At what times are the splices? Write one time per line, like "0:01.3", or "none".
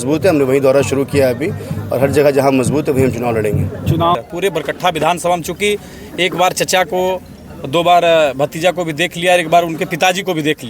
0:04.2